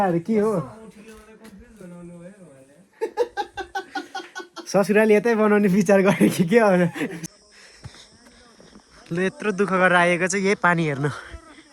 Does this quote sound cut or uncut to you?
cut